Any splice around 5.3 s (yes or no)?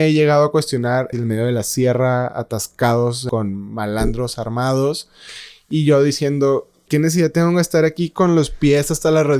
no